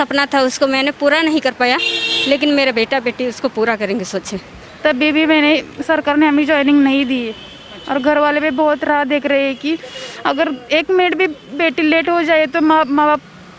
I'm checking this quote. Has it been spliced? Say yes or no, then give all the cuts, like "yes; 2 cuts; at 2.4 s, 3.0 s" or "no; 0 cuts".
yes; 1 cut; at 4.6 s